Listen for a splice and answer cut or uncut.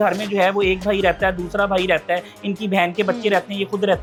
uncut